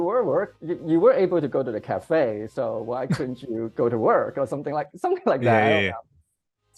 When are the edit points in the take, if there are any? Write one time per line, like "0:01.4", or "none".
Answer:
none

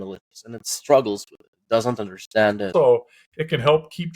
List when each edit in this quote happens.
0:02.7

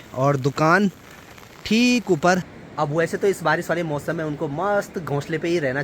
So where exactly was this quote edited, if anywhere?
0:02.5

